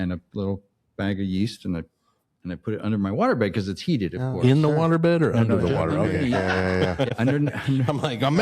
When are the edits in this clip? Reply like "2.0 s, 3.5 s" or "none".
7.1 s